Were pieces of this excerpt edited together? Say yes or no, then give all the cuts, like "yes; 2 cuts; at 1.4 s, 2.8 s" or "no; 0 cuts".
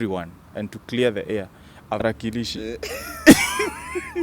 yes; 1 cut; at 2.0 s